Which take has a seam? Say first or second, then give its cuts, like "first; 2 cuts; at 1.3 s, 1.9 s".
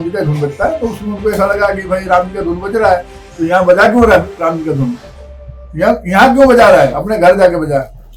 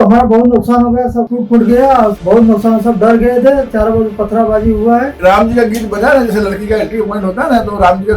second; 3 cuts; at 1.3 s, 2.2 s, 5.1 s